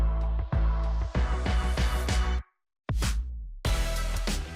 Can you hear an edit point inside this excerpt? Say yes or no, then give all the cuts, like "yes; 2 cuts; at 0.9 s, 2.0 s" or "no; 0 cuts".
yes; 1 cut; at 0.9 s